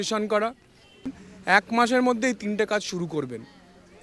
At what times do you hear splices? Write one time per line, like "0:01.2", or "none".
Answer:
0:01.1